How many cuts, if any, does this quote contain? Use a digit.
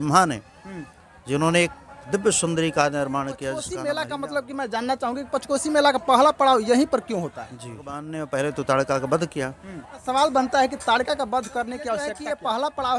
4